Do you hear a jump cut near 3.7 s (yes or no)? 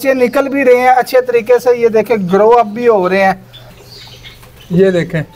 yes